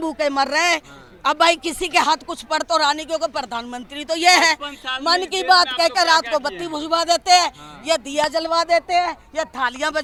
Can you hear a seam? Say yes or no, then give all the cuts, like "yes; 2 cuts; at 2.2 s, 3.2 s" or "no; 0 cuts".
no; 0 cuts